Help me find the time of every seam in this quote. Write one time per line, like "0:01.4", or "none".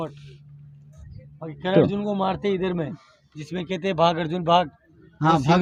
none